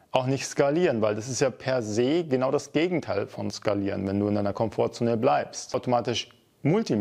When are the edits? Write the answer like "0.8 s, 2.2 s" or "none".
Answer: 5.7 s